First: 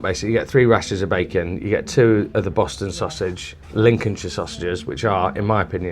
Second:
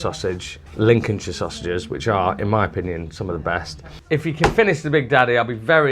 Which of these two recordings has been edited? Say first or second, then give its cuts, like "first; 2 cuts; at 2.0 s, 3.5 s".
second; 1 cut; at 3.9 s